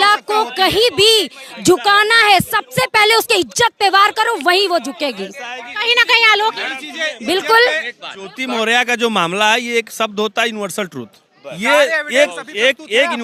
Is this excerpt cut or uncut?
uncut